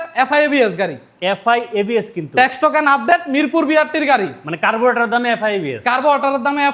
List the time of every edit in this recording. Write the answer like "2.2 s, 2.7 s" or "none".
none